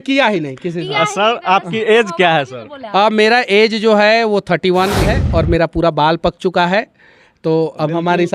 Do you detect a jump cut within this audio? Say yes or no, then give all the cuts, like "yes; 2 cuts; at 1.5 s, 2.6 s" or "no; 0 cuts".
yes; 1 cut; at 5.1 s